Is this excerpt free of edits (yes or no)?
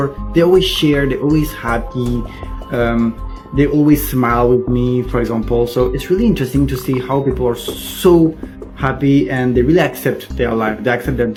yes